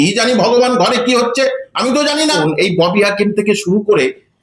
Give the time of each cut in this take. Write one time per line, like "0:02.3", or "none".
0:02.4

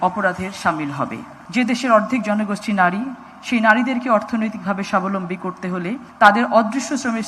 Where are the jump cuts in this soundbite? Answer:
0:01.4
0:06.1

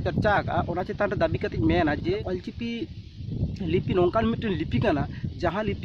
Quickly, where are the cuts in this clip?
0:02.2

